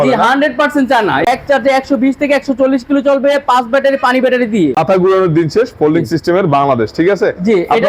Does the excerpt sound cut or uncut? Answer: cut